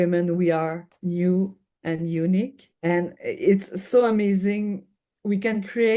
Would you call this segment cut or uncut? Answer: cut